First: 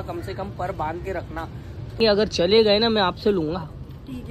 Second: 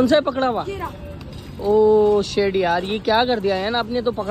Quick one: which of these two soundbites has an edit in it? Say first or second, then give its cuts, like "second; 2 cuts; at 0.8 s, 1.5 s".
first; 1 cut; at 2.0 s